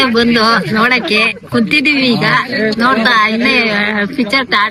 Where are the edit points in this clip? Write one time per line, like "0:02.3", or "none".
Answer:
none